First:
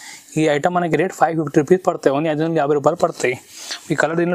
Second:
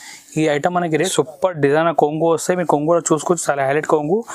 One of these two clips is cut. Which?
second; 1 cut; at 0.9 s

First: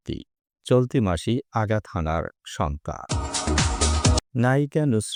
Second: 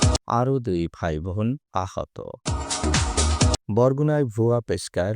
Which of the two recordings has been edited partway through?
second; 1 cut; at 1.6 s

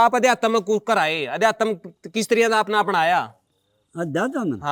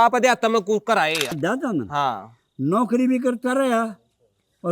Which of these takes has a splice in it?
second; 1 cut; at 1.3 s

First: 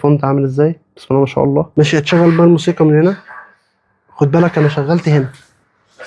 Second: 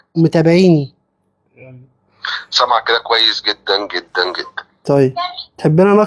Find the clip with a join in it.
first; 1 cut; at 1.7 s

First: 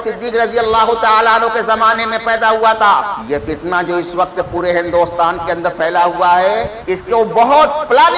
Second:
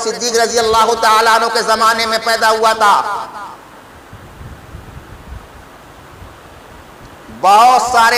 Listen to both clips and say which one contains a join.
first; 2 cuts; at 3.1 s, 6.7 s

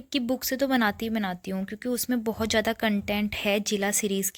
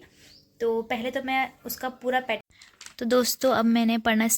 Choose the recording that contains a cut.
second; 1 cut; at 2.4 s

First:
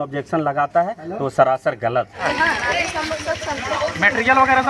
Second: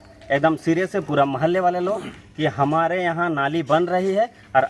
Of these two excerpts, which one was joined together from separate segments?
first; 1 cut; at 2.2 s

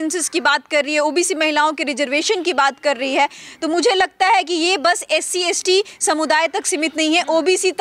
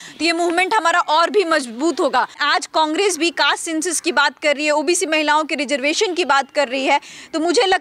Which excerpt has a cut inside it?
second; 1 cut; at 2.4 s

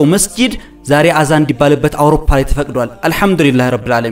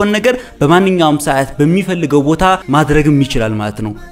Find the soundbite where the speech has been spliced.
second; 1 cut; at 2.6 s

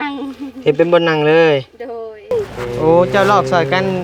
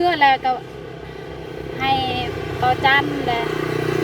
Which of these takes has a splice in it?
first; 1 cut; at 2.3 s

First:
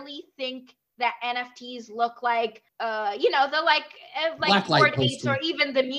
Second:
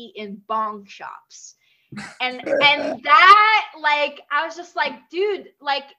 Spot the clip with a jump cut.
first; 1 cut; at 2.7 s

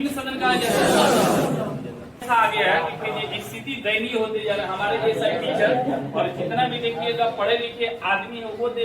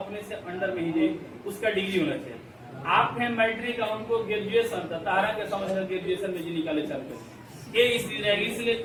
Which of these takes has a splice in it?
first; 1 cut; at 2.2 s

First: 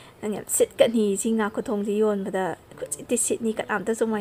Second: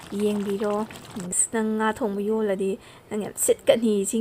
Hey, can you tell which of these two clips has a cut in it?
second; 1 cut; at 1.3 s

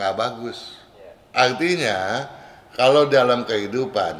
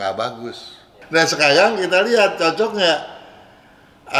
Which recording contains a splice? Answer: second; 1 cut; at 0.9 s

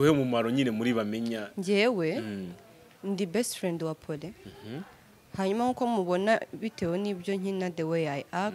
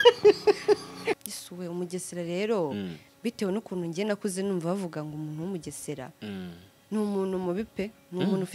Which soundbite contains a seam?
second; 1 cut; at 1.3 s

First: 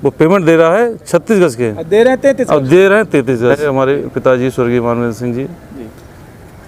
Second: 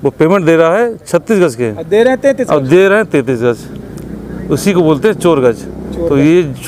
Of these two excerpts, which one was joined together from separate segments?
first; 1 cut; at 3.7 s

